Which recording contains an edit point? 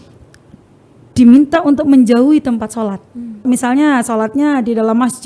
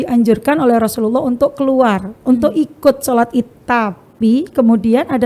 first; 1 cut; at 3.4 s

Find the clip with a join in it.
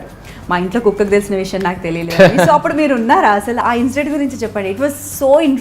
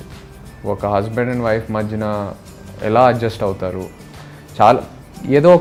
first; 1 cut; at 3.6 s

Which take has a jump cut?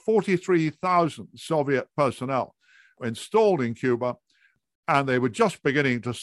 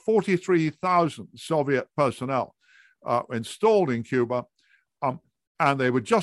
first; 2 cuts; at 3.0 s, 4.6 s

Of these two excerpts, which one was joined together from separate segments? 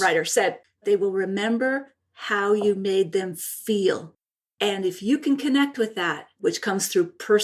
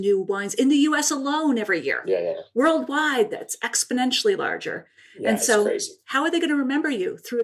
first; 3 cuts; at 0.8 s, 4.5 s, 6.4 s

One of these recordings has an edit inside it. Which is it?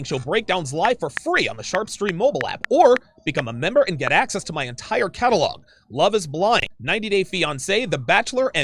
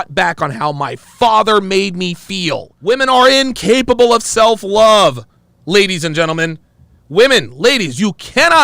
second; 1 cut; at 2.7 s

